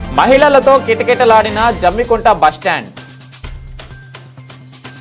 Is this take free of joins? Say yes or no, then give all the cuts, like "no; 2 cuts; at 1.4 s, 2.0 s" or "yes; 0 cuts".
yes; 0 cuts